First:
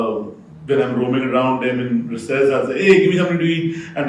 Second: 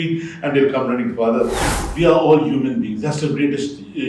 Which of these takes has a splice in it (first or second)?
second